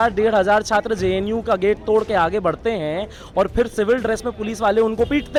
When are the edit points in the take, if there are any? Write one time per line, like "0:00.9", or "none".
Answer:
none

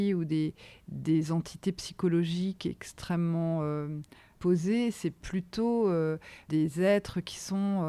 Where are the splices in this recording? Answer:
none

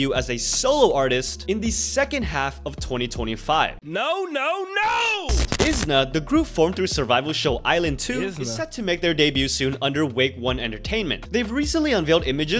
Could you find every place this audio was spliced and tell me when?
0:03.8
0:05.4
0:11.2

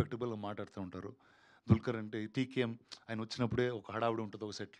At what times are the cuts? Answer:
none

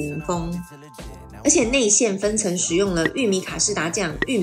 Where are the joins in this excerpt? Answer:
0:01.2

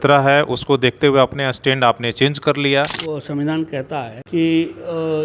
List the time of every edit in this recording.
0:03.0
0:04.2

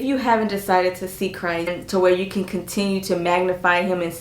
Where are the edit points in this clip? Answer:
0:01.8

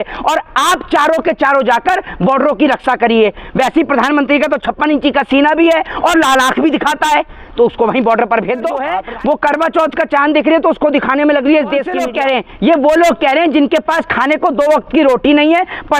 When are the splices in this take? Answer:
0:08.9
0:11.9

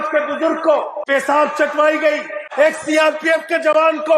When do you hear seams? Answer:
0:01.0
0:02.4

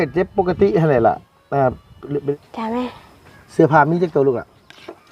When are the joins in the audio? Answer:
0:02.3

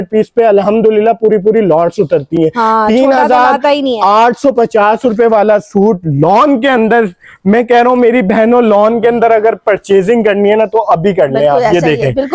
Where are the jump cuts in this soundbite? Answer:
none

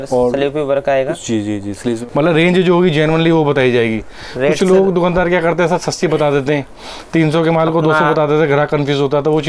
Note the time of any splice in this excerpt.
0:02.0

